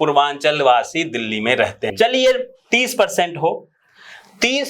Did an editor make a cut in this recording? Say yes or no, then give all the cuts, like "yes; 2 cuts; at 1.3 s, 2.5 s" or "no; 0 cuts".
yes; 1 cut; at 1.8 s